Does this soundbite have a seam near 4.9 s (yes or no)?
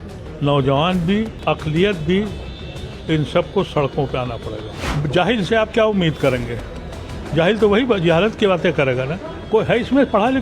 yes